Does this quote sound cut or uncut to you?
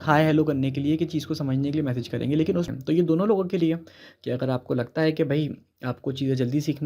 cut